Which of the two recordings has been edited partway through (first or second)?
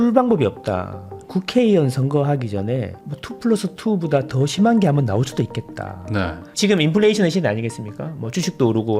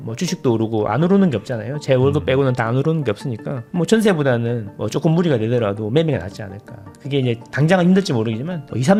first